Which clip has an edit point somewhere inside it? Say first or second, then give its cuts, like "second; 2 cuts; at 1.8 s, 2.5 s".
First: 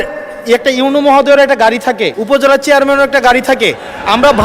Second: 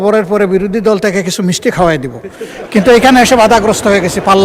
first; 1 cut; at 2.1 s